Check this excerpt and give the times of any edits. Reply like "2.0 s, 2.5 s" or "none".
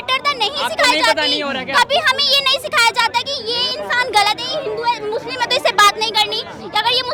none